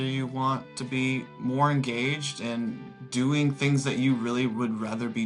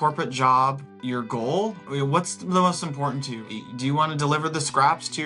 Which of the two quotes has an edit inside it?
second; 3 cuts; at 0.9 s, 1.9 s, 3.4 s

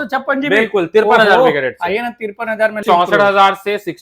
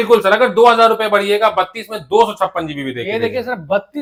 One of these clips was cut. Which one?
first; 1 cut; at 2.8 s

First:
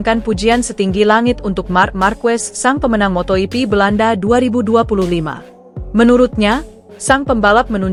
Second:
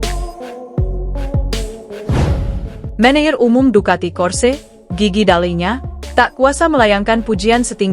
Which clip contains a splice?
second; 1 cut; at 2.6 s

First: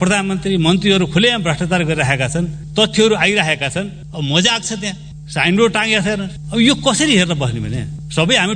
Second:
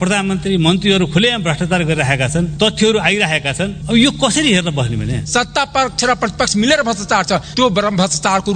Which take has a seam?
second; 3 cuts; at 2.5 s, 3.8 s, 5.2 s

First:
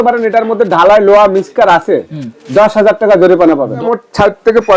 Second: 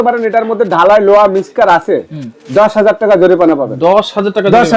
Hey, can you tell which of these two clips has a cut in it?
first; 1 cut; at 3.8 s

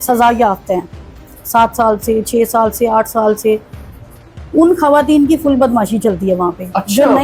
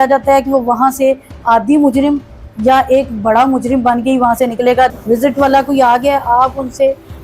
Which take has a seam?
second; 1 cut; at 4.9 s

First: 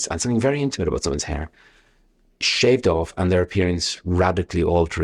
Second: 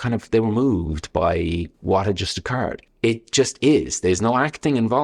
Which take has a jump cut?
second; 2 cuts; at 1.7 s, 2.8 s

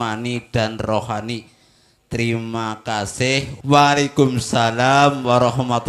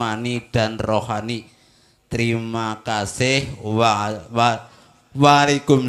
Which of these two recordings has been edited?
first; 1 cut; at 3.5 s

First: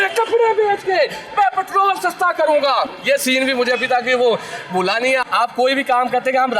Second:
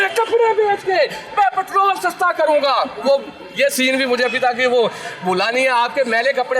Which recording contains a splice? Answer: first; 2 cuts; at 2.9 s, 5.2 s

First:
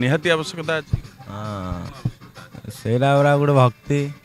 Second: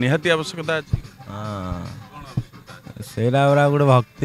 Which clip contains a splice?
first; 1 cut; at 1.9 s

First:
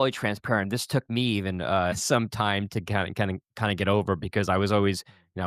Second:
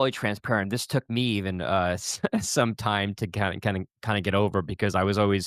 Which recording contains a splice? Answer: first; 1 cut; at 2.0 s

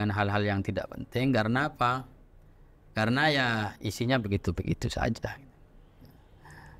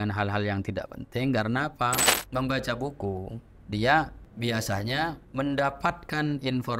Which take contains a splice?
second; 3 cuts; at 2.1 s, 4.2 s, 5.2 s

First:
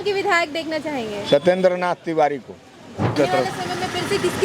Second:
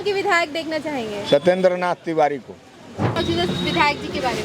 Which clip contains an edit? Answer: first; 1 cut; at 3.1 s

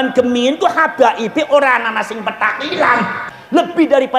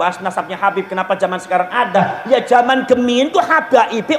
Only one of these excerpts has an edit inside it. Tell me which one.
first; 1 cut; at 3.2 s

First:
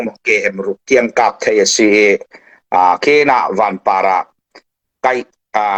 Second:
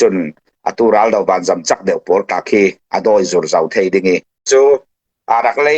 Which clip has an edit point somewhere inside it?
second; 1 cut; at 4.4 s

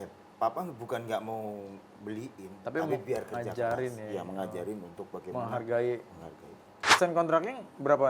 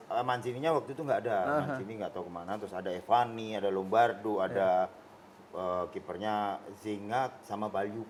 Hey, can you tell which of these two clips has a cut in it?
first; 1 cut; at 6.9 s

